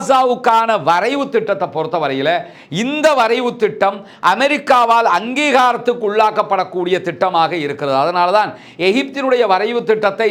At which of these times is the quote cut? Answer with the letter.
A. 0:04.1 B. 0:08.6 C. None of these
C